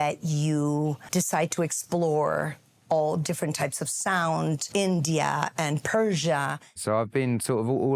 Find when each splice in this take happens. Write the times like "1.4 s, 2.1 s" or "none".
1.0 s, 4.7 s, 6.8 s